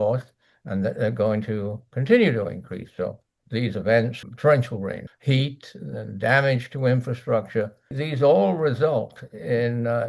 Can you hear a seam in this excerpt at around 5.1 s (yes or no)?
yes